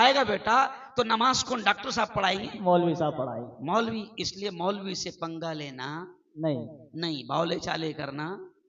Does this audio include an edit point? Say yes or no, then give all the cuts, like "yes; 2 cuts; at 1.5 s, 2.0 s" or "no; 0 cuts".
no; 0 cuts